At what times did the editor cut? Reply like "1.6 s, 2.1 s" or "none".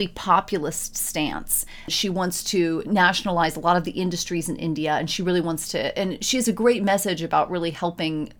1.9 s